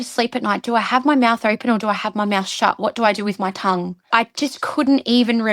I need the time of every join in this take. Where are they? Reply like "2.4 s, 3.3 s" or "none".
4.1 s